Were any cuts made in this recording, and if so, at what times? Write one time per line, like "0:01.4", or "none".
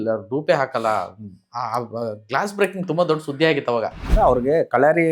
0:04.1